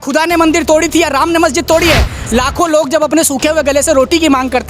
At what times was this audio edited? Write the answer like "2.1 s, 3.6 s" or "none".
2.2 s